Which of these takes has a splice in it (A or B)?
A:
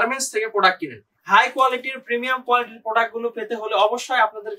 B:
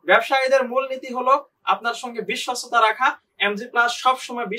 A